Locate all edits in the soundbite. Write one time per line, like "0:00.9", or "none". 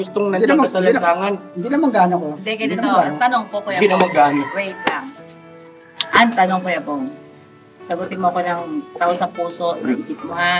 none